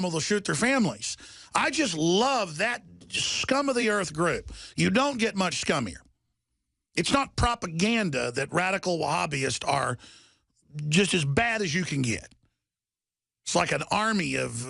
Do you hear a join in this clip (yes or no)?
no